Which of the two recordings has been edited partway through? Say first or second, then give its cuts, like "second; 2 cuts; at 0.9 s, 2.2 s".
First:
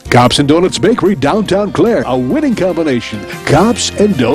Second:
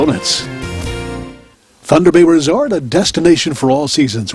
second; 1 cut; at 1.4 s